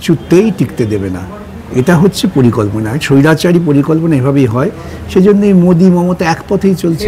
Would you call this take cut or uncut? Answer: uncut